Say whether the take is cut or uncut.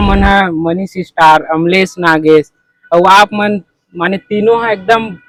uncut